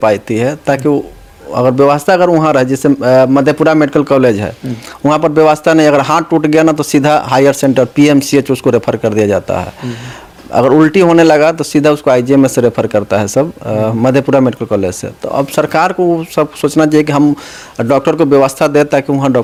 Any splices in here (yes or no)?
no